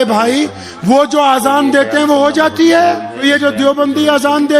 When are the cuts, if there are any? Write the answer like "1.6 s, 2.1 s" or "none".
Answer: 3.2 s